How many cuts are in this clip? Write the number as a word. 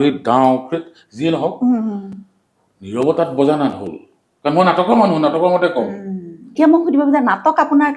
one